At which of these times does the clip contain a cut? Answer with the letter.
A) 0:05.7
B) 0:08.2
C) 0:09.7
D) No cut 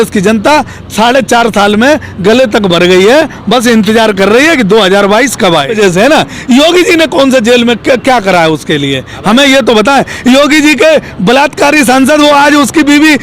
A